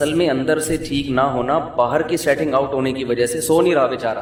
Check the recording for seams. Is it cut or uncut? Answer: uncut